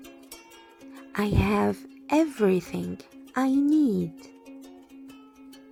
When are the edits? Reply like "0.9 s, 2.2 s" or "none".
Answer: none

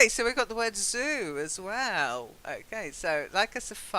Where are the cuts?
1.7 s

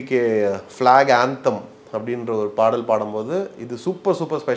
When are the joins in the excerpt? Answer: none

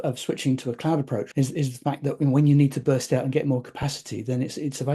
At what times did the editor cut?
1.3 s

